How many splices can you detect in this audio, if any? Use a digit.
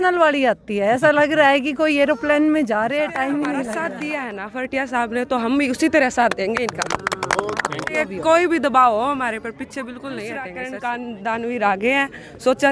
3